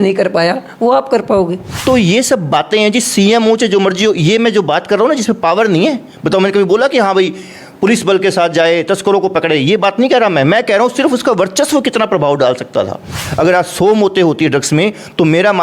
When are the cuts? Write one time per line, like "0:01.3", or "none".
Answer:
0:01.7
0:13.2